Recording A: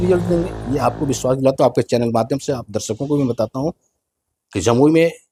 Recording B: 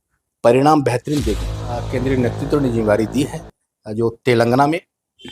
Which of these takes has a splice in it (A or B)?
B